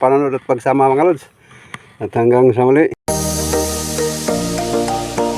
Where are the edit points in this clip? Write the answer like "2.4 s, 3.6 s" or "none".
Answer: 3.0 s